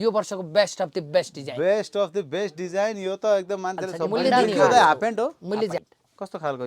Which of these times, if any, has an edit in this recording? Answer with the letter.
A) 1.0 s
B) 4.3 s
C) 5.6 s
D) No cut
B